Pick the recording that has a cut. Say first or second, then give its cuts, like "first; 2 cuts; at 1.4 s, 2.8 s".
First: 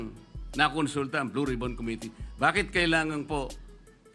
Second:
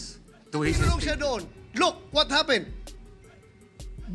second; 1 cut; at 1.0 s